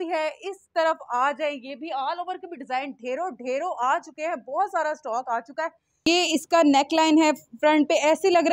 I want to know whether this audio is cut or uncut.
cut